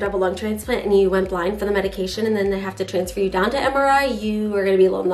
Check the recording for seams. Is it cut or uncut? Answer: uncut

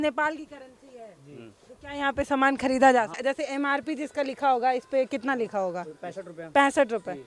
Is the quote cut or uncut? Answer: cut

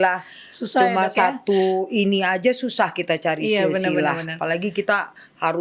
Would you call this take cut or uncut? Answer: uncut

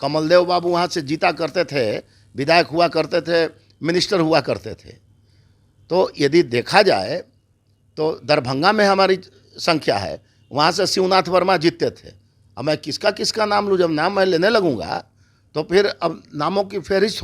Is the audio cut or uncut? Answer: uncut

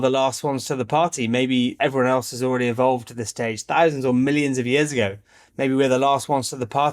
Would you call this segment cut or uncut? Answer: cut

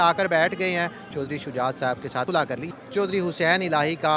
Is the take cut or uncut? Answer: cut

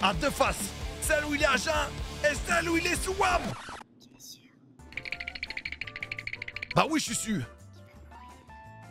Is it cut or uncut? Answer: uncut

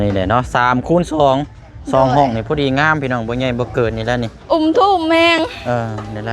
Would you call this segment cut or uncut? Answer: uncut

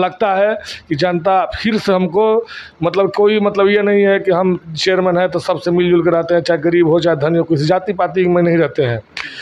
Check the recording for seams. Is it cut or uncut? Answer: uncut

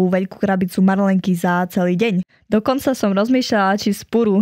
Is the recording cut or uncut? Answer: cut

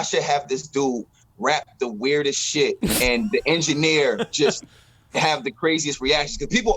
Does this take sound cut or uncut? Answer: cut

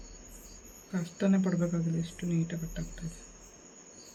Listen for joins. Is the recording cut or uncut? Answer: uncut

